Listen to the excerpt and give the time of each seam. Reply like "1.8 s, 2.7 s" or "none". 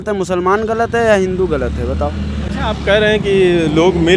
none